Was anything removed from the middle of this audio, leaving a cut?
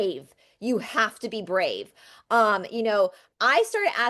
no; 0 cuts

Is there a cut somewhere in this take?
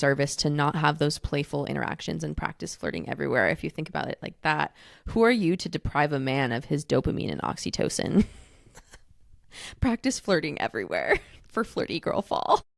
no; 0 cuts

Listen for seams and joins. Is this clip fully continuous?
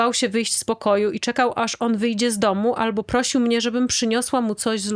yes; 0 cuts

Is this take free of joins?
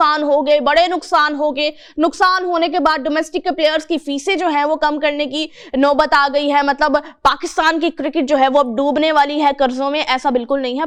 yes; 0 cuts

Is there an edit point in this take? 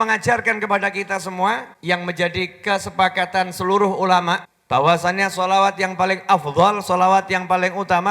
yes; 2 cuts; at 1.7 s, 4.5 s

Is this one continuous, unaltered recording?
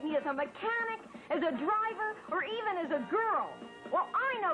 no; 1 cut; at 3.5 s

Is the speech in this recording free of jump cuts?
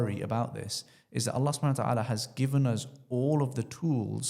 yes; 0 cuts

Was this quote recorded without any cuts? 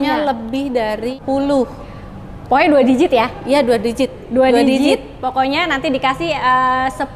no; 1 cut; at 1.2 s

